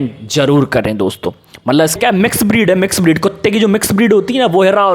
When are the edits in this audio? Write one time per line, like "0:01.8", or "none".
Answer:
0:02.0